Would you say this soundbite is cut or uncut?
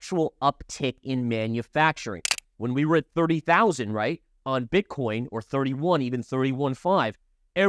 cut